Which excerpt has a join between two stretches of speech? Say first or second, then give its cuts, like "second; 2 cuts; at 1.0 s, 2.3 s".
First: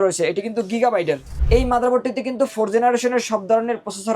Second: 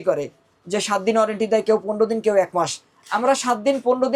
first; 1 cut; at 1.3 s